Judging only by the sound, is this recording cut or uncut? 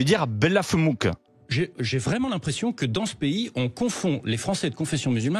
cut